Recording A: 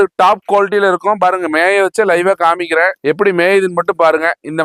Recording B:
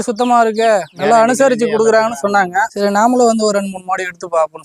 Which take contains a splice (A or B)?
B